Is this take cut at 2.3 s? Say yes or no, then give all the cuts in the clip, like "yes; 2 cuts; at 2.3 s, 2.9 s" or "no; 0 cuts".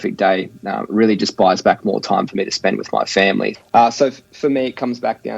no; 1 cut; at 3.5 s